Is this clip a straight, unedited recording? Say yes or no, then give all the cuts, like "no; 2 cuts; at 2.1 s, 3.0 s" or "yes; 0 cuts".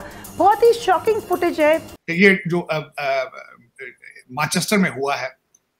no; 1 cut; at 1.9 s